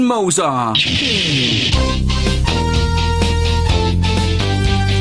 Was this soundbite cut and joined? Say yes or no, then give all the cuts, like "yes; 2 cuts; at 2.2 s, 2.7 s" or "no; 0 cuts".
no; 0 cuts